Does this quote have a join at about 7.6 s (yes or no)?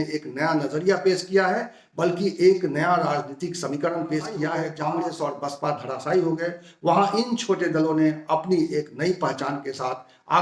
no